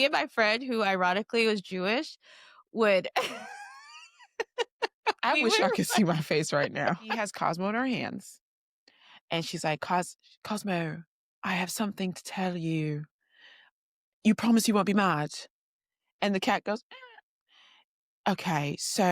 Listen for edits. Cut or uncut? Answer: cut